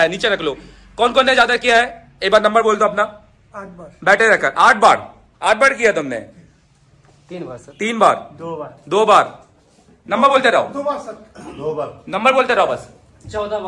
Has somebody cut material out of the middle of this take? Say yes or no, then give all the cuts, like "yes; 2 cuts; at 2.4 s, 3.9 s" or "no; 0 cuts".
no; 0 cuts